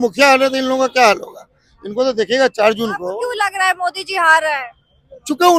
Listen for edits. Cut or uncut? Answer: uncut